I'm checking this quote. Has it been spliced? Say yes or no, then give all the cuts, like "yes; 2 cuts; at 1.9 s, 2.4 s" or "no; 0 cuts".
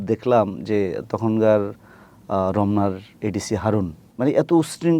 yes; 1 cut; at 4.0 s